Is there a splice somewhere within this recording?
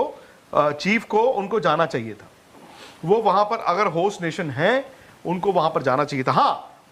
no; 0 cuts

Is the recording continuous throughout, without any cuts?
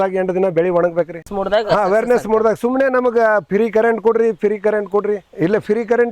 no; 1 cut; at 1.2 s

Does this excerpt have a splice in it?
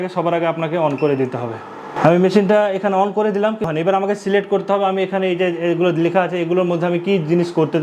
yes; 2 cuts; at 1.9 s, 3.7 s

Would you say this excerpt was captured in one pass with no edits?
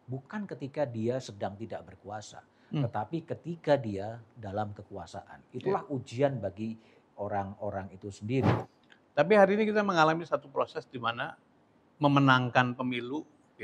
no; 1 cut; at 8.7 s

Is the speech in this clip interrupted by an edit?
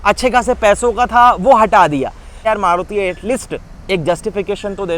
yes; 1 cut; at 2.4 s

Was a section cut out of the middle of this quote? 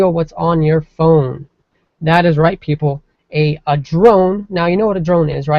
yes; 1 cut; at 2.4 s

